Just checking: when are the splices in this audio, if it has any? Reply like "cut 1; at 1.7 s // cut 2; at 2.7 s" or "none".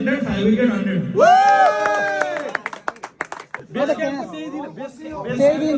cut 1; at 3.7 s